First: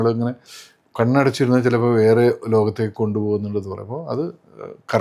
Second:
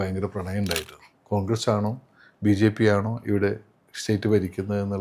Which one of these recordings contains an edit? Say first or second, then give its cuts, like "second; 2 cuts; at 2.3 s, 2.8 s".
second; 1 cut; at 0.9 s